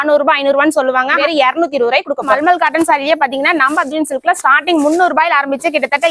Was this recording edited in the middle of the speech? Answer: yes; 2 cuts; at 1.2 s, 2.3 s

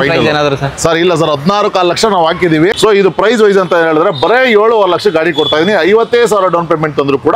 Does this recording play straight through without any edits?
no; 1 cut; at 2.7 s

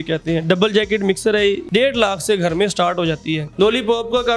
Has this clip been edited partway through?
yes; 2 cuts; at 1.6 s, 3.4 s

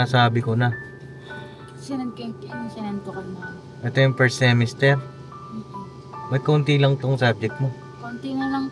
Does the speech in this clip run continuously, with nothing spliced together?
yes; 0 cuts

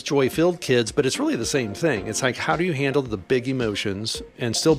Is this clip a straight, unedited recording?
yes; 0 cuts

